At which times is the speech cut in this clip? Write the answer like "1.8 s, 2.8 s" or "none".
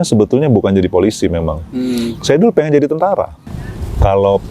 3.4 s